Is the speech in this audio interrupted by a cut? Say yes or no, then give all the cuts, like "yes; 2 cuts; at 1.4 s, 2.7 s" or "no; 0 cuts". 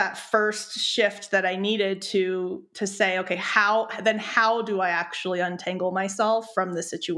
no; 0 cuts